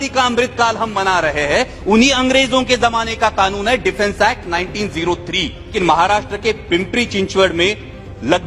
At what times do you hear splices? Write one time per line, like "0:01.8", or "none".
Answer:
0:05.7